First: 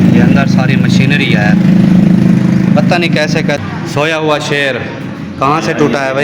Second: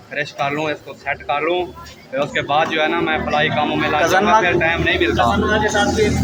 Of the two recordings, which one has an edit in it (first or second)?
first